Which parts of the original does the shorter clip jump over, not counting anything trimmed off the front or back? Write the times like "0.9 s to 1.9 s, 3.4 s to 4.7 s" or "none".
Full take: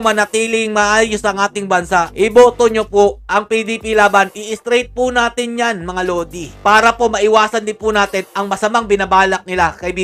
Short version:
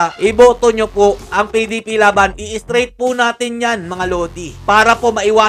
none